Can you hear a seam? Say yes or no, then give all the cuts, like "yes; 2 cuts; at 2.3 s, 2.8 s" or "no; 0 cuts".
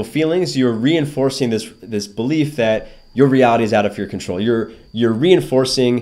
no; 0 cuts